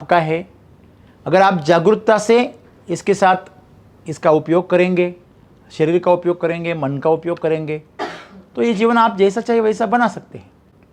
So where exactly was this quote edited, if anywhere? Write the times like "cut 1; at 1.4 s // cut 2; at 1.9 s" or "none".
none